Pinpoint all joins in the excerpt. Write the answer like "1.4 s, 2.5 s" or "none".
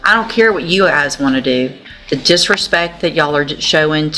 1.9 s